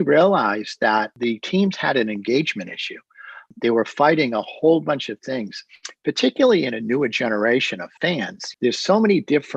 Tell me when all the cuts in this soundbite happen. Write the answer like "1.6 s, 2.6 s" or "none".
1.1 s, 8.3 s